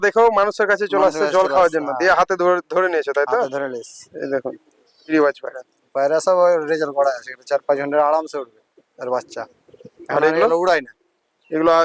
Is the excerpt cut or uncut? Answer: cut